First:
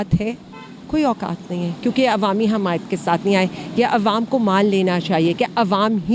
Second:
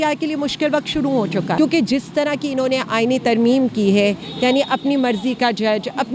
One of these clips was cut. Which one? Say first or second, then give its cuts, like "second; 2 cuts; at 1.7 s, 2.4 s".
second; 1 cut; at 1.6 s